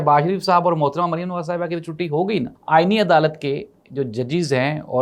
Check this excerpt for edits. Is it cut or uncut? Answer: cut